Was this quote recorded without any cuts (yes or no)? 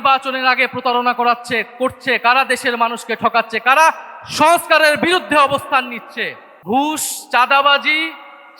no